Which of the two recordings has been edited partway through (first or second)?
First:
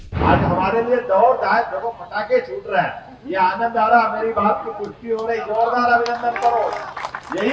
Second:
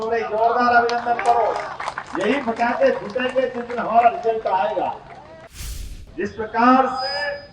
second